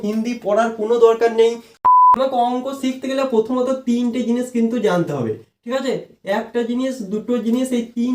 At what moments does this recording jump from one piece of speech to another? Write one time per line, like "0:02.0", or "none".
0:01.8